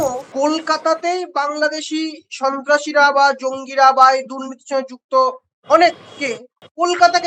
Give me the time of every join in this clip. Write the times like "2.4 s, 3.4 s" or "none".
none